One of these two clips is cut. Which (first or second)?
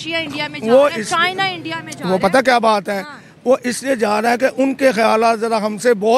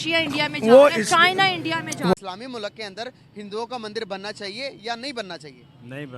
second